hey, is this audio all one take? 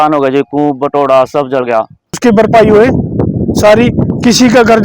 no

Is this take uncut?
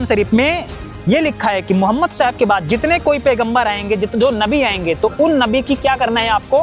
yes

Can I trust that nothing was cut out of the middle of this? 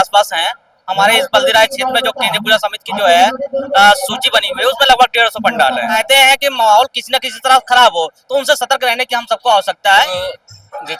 no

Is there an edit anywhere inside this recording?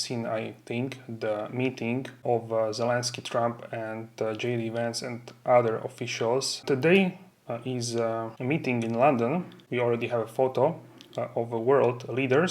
yes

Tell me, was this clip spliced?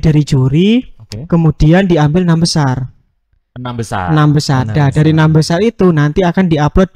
no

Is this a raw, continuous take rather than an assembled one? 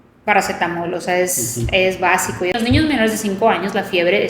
no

